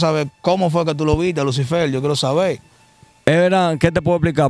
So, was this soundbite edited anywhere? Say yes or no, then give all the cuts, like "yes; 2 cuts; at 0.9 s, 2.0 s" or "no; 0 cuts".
no; 0 cuts